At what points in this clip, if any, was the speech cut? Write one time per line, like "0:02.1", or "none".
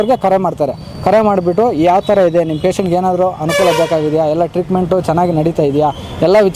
none